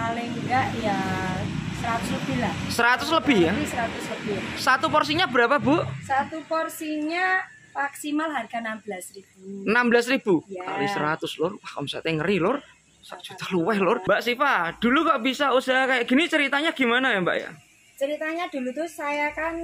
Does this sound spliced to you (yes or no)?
yes